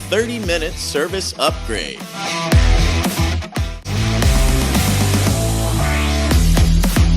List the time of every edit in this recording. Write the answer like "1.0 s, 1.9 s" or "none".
3.8 s